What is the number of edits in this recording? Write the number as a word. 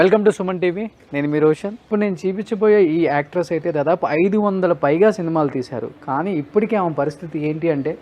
one